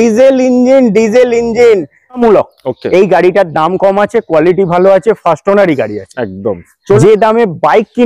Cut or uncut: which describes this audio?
cut